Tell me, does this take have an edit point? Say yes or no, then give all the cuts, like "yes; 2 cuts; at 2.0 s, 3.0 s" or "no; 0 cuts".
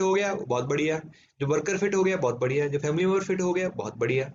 no; 0 cuts